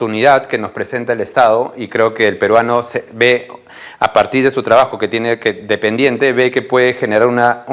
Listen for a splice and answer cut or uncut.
uncut